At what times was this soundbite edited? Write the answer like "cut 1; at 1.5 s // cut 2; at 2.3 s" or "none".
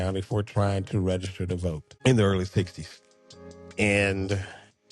cut 1; at 1.9 s